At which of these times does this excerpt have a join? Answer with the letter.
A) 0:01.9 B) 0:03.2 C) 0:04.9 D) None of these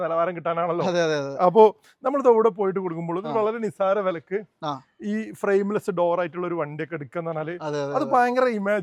D